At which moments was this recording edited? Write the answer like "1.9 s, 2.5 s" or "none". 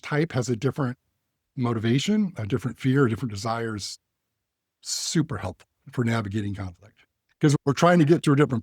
none

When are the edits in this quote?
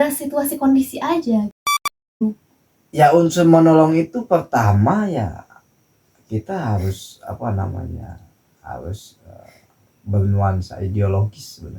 1.9 s

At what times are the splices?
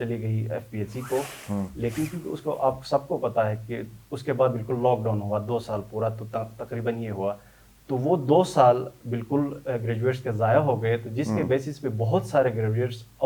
none

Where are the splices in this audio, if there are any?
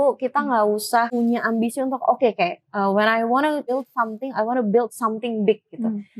1.1 s, 3.7 s

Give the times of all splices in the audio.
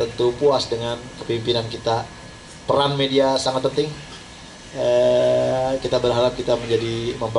none

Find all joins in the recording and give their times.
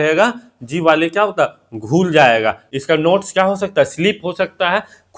2.7 s

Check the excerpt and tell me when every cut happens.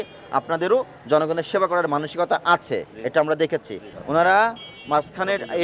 3.9 s

